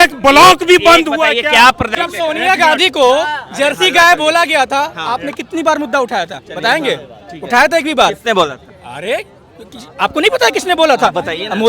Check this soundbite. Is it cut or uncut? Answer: cut